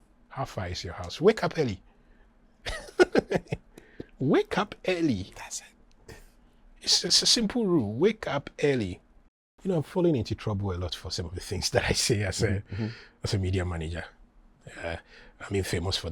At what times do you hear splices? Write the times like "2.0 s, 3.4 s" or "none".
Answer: 9.5 s

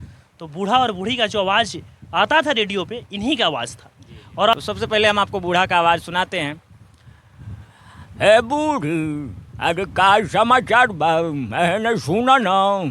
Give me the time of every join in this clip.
4.5 s

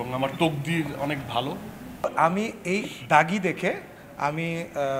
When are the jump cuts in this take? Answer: 2.0 s

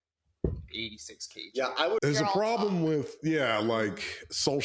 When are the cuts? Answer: 2.0 s

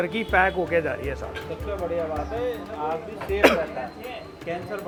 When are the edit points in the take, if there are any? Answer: none

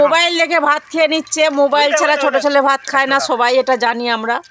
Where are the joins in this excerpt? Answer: none

